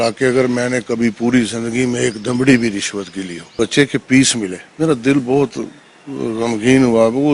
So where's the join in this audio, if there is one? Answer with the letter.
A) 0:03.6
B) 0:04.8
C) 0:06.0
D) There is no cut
A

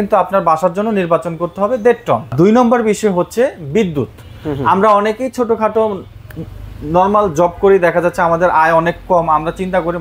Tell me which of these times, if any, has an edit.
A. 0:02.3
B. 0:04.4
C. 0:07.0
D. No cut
A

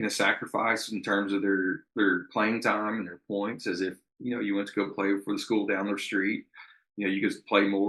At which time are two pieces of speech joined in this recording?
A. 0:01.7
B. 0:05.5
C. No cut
C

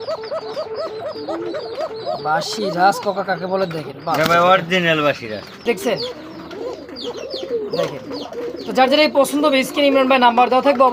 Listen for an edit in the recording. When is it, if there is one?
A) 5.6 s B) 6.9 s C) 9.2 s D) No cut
A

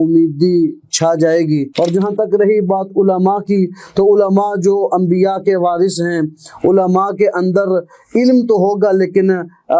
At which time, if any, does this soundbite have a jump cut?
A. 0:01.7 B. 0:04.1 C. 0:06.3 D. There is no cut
A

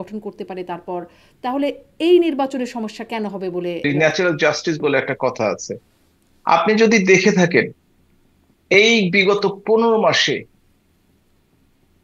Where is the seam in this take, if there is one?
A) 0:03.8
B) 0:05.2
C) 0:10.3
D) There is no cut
A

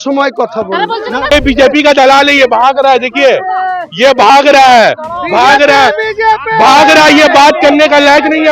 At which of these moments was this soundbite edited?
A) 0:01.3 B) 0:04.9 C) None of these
A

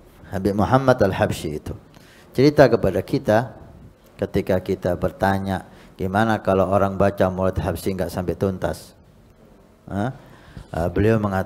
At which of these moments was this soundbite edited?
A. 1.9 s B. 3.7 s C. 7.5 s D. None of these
D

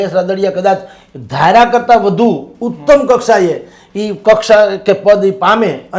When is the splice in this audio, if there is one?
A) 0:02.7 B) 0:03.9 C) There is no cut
C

